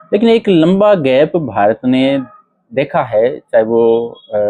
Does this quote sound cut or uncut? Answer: uncut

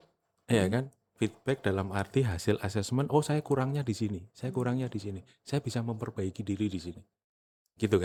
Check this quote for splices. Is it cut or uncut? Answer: uncut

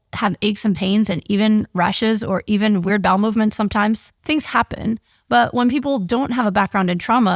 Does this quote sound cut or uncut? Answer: cut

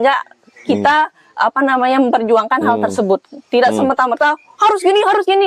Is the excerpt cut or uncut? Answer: uncut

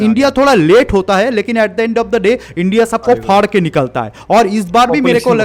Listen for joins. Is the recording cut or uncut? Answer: uncut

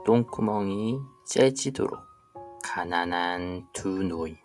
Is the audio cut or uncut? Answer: uncut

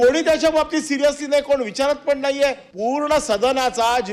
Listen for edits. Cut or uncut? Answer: cut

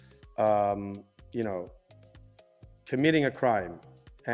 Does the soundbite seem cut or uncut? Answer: uncut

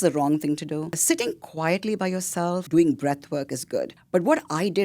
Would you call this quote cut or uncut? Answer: cut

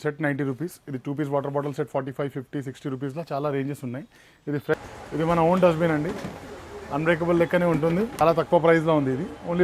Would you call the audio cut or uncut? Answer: cut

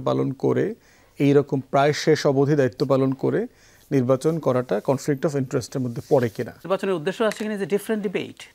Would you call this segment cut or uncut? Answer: cut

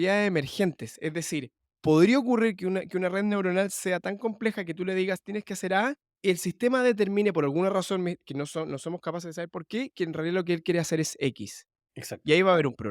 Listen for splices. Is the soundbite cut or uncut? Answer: cut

